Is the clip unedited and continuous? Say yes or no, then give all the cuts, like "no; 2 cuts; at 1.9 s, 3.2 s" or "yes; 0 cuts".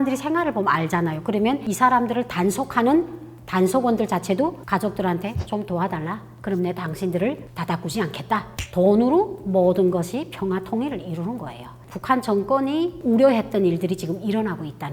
no; 1 cut; at 11.8 s